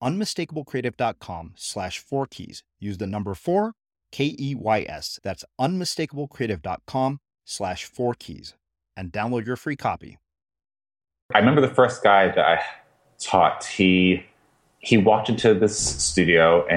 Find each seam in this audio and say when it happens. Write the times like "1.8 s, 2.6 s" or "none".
11.3 s